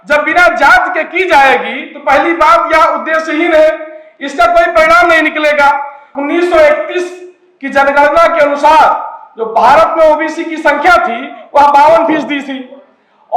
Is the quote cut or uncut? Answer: cut